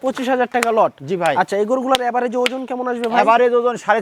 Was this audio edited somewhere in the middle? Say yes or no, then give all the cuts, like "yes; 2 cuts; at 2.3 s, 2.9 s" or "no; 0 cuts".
no; 0 cuts